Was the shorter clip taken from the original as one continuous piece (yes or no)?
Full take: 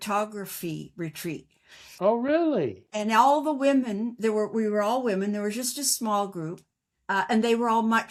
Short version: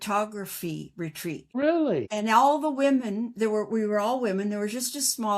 no